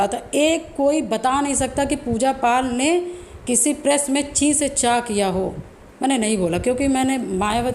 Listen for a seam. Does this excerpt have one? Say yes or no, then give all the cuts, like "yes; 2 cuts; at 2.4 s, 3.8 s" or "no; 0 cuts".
no; 0 cuts